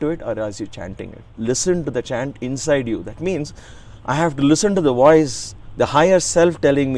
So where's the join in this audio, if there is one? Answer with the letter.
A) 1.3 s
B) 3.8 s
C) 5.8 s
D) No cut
A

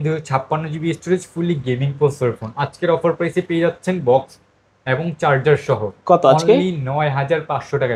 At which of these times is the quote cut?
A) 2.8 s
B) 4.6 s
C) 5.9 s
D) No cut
D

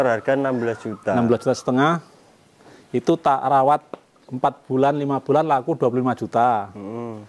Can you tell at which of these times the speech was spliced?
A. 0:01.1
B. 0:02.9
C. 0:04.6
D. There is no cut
D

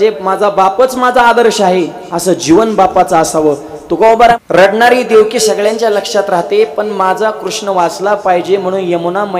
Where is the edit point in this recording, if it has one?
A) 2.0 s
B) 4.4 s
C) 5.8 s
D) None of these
B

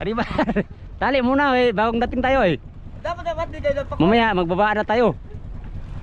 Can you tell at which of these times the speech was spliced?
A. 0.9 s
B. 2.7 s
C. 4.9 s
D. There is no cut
D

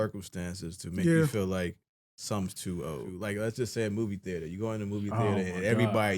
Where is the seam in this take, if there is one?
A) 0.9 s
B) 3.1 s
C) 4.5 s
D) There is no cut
B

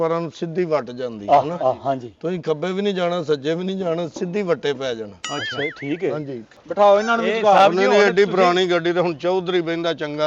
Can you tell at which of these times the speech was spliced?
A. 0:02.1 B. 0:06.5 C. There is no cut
B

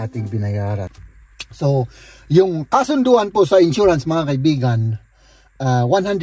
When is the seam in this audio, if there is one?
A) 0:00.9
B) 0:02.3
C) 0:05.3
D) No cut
A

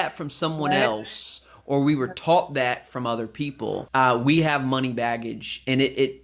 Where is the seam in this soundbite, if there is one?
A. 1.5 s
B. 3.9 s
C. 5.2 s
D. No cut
B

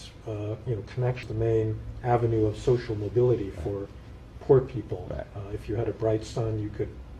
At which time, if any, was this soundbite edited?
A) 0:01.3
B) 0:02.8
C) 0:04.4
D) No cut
A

